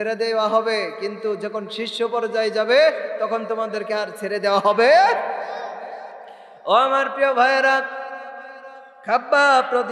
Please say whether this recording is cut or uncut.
uncut